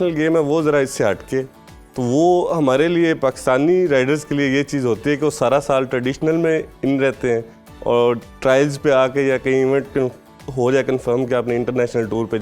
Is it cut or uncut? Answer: uncut